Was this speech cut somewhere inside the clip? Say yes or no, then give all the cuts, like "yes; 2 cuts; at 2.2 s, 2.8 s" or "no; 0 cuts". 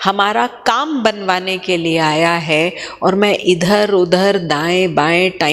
no; 0 cuts